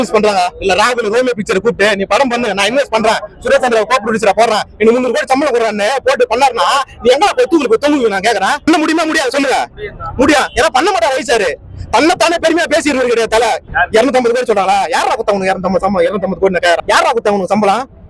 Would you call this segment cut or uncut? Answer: cut